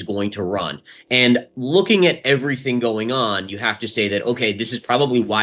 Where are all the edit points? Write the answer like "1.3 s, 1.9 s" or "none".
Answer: none